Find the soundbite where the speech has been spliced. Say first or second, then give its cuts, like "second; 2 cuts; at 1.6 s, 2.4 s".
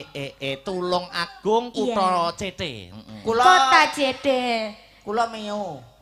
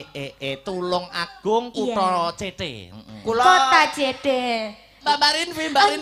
second; 1 cut; at 5.0 s